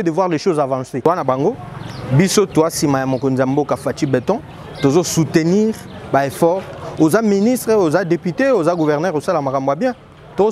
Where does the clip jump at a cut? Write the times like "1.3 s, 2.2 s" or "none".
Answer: 0.9 s